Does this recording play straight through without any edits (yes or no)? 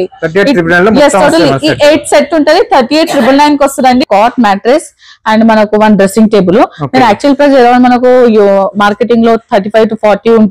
no